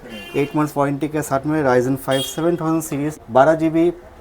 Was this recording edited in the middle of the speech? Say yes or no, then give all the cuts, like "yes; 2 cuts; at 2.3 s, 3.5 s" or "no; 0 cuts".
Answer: yes; 1 cut; at 3.2 s